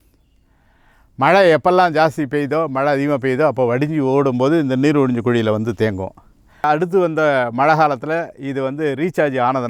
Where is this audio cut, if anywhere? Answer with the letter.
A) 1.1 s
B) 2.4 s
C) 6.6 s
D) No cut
C